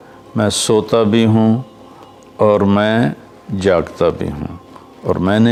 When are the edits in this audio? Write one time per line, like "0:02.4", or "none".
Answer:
none